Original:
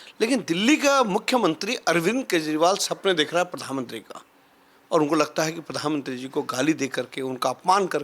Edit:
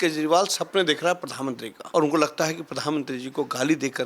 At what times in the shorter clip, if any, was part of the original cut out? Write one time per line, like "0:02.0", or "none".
0:01.7